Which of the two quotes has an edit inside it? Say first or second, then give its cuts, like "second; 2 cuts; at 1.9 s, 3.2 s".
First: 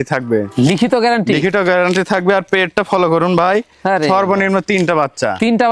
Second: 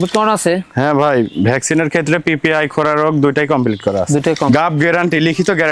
second; 1 cut; at 4.5 s